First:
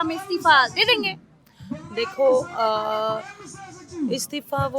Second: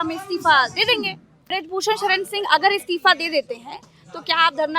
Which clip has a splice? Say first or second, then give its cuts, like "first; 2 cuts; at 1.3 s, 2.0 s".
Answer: second; 1 cut; at 1.3 s